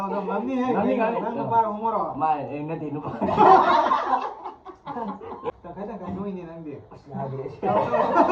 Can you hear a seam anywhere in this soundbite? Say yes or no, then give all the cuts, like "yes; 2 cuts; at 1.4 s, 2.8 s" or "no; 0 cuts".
yes; 1 cut; at 5.5 s